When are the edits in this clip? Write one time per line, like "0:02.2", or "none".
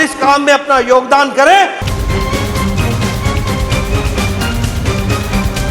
0:01.8